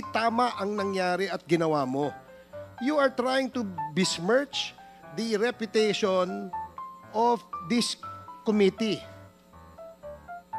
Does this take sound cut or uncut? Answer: cut